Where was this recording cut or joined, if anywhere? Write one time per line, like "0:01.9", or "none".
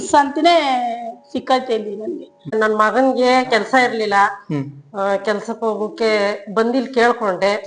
0:02.5